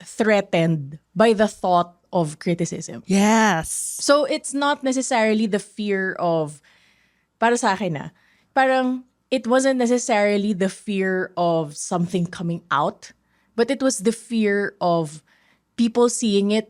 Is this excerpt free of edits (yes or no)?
yes